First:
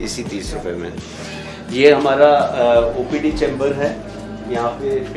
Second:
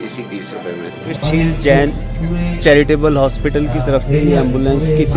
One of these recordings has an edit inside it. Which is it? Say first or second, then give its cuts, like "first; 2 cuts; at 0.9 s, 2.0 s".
second; 1 cut; at 1.2 s